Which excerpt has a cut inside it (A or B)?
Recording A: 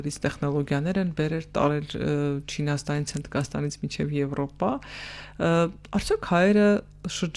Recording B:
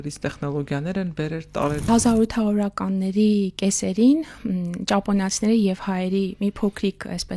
B